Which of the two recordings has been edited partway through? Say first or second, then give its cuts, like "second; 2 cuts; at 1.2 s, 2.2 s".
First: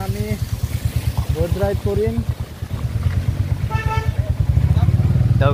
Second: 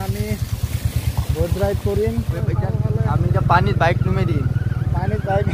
second; 1 cut; at 2.4 s